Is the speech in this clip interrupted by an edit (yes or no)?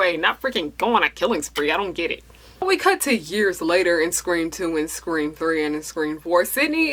no